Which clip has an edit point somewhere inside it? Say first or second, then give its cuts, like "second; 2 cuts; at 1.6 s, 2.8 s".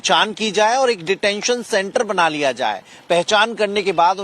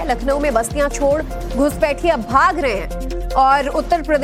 first; 1 cut; at 2.3 s